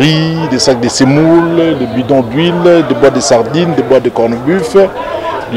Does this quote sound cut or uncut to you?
uncut